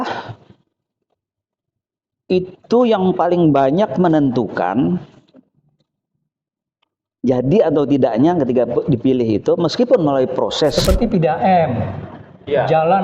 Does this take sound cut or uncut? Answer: cut